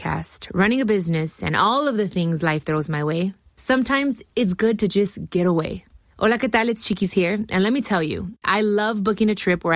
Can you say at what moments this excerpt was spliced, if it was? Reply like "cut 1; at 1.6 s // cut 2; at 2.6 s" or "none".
none